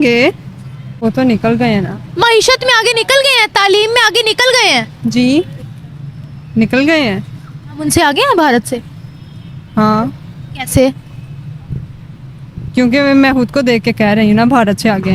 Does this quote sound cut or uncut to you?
cut